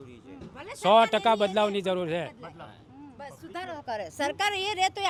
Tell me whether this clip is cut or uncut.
uncut